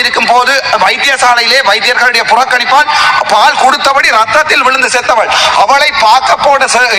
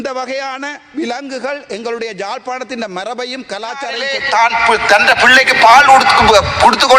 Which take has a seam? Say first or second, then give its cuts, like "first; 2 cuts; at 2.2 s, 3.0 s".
second; 1 cut; at 4.1 s